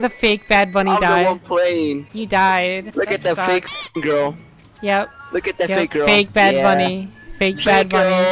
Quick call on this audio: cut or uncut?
cut